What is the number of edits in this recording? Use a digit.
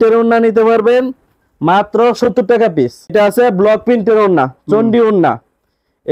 1